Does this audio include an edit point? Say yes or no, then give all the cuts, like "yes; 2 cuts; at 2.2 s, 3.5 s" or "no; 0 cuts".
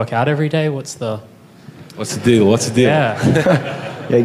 no; 0 cuts